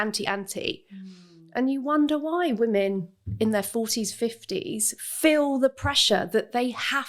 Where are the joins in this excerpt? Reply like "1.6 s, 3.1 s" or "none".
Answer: none